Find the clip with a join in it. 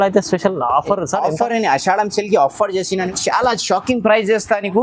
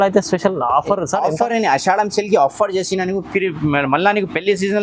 first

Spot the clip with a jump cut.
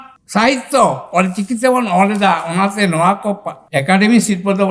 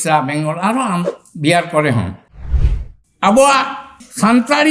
second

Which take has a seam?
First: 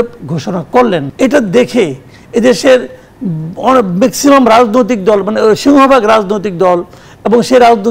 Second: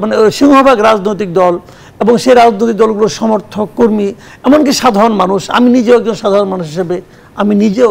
first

